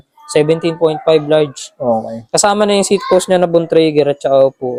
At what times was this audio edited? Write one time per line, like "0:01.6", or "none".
none